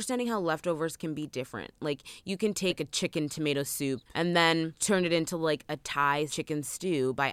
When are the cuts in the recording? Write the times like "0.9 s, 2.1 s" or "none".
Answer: 2.8 s, 4.1 s, 4.8 s, 6.4 s